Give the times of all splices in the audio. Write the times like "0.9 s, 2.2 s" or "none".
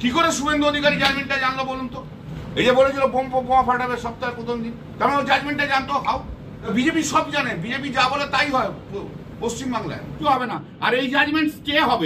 2.3 s, 6.7 s, 10.2 s